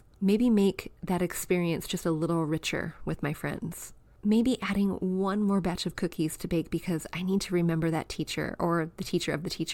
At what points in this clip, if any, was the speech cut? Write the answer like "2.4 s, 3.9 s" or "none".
none